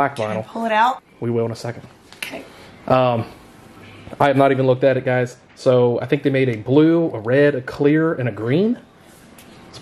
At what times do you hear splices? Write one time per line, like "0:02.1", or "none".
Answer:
0:01.0